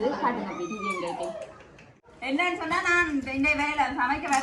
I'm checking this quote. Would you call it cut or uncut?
cut